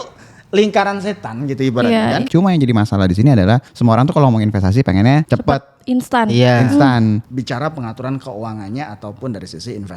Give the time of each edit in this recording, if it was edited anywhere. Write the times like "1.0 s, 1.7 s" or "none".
2.3 s, 3.7 s, 5.3 s, 7.3 s